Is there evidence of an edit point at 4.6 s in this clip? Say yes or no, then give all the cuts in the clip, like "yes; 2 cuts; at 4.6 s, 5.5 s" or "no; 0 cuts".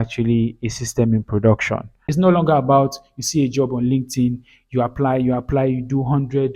no; 1 cut; at 1.9 s